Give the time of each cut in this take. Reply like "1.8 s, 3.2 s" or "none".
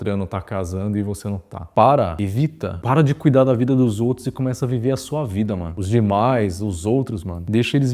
1.7 s, 2.8 s, 5.7 s

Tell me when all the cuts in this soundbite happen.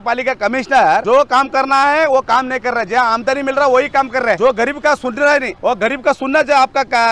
1.0 s, 4.4 s, 5.5 s

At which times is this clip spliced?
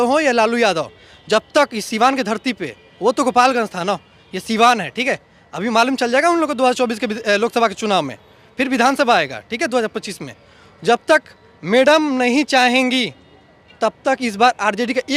none

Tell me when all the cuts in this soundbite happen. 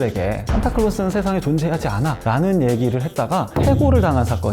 none

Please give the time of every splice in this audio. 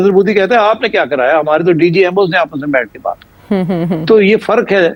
none

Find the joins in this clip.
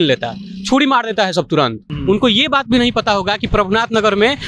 1.9 s

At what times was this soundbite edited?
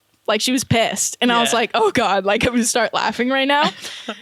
none

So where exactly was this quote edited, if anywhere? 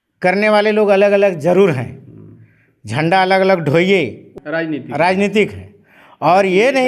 4.3 s

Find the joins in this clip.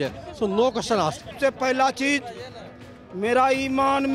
1.4 s

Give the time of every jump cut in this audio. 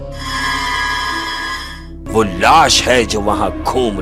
1.9 s

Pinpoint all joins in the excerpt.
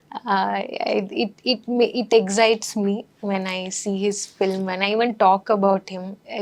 none

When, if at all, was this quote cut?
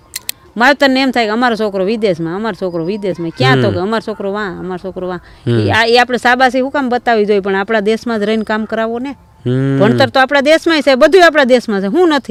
none

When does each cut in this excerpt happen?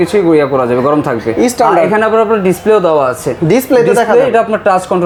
none

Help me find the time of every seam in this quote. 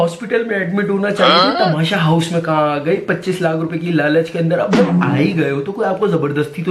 none

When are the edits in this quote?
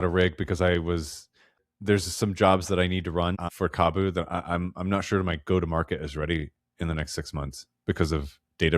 1.6 s, 3.5 s

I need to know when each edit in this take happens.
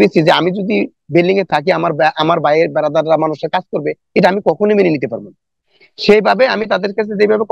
none

